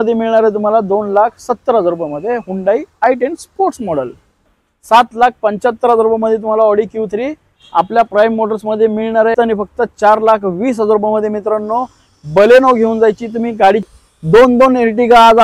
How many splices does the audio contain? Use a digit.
3